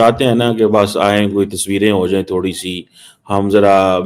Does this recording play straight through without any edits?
yes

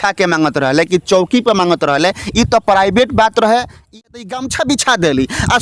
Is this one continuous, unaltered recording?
no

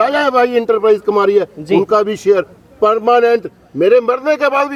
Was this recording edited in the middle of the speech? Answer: no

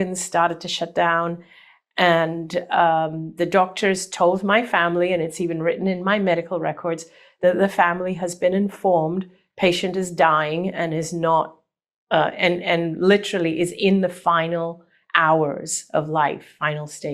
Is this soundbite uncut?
yes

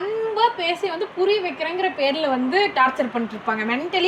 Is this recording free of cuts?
yes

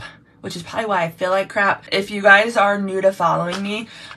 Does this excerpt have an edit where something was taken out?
yes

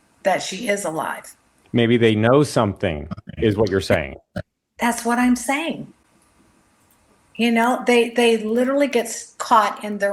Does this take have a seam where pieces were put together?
no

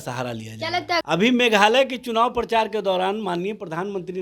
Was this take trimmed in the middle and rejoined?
yes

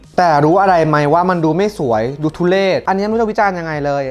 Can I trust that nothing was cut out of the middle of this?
no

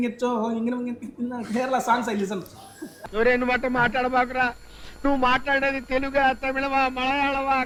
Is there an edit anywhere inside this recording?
no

